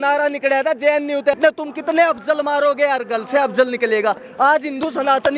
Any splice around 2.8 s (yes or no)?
no